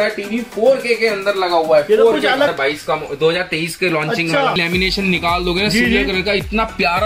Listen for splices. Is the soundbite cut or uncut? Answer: cut